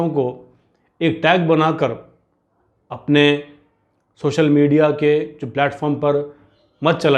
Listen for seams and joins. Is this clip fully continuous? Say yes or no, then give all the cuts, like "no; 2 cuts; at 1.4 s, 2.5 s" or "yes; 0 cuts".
yes; 0 cuts